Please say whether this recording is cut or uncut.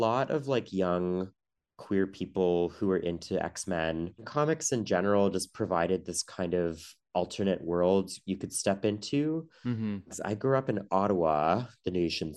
cut